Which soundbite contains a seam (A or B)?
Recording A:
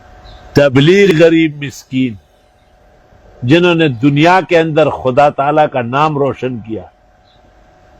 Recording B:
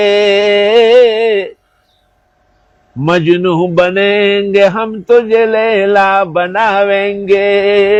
A